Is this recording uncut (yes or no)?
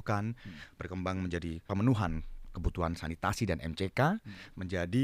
no